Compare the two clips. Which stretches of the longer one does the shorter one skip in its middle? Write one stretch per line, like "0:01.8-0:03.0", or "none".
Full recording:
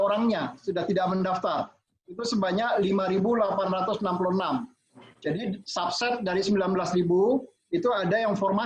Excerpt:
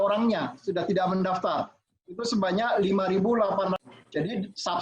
0:03.8-0:04.9